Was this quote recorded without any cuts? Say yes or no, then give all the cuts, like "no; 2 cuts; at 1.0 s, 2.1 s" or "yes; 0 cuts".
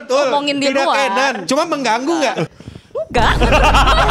no; 2 cuts; at 1.4 s, 2.5 s